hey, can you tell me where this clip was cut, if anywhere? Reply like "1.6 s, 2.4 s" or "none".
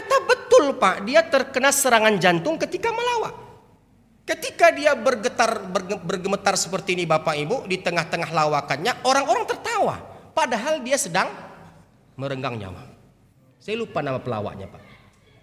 none